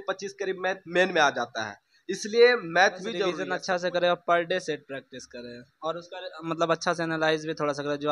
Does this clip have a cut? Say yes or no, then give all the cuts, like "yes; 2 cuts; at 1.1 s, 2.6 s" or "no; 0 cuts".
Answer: yes; 1 cut; at 3.3 s